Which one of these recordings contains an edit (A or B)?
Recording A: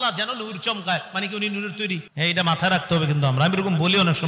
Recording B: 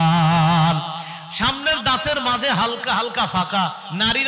A